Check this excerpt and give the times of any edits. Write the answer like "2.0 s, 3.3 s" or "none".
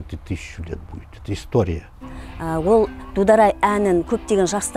2.1 s